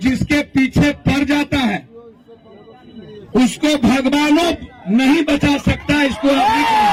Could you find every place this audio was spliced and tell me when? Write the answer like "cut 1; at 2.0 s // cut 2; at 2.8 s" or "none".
none